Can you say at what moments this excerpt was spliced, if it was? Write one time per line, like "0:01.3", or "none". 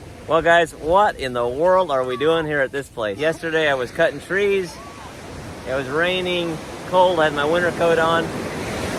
0:03.2